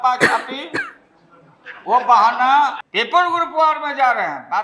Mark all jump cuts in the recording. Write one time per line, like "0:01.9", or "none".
0:02.9